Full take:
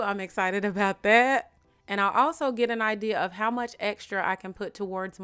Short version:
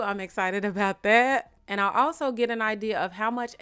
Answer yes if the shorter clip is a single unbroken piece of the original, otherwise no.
no